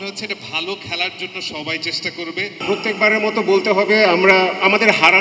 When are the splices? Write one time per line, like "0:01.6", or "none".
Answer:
0:02.5